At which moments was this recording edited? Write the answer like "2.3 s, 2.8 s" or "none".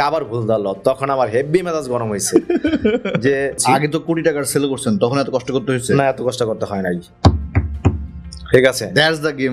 3.6 s

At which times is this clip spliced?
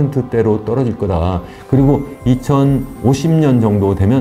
2.9 s

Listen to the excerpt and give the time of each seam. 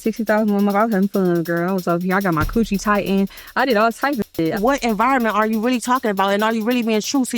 4.6 s

